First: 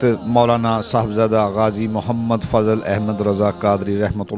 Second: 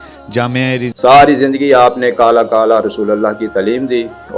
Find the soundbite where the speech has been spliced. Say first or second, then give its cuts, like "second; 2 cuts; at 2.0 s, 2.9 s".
second; 1 cut; at 0.9 s